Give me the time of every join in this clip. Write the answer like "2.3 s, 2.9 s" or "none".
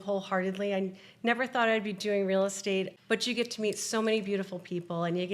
none